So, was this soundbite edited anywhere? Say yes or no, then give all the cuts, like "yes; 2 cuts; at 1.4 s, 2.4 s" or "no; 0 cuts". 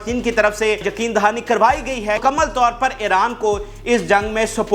yes; 2 cuts; at 0.9 s, 2.2 s